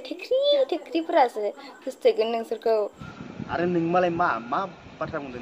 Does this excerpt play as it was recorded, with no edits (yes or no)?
yes